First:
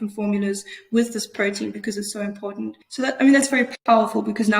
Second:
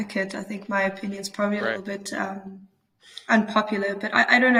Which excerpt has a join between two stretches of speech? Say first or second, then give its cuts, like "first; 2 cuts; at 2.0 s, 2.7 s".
first; 1 cut; at 2.8 s